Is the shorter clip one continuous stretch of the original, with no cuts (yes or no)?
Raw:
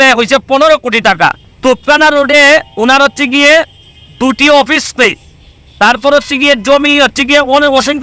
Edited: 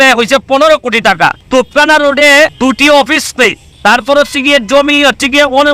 no